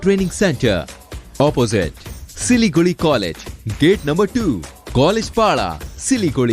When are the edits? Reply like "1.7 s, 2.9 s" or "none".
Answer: none